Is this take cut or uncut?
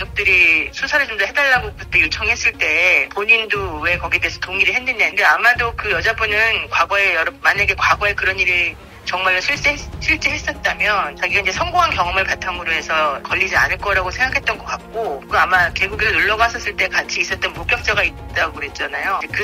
uncut